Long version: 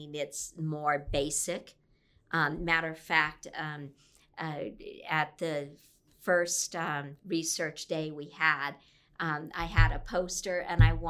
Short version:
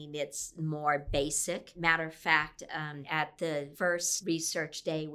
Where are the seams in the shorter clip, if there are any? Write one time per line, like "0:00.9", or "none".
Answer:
0:01.8
0:03.0
0:04.1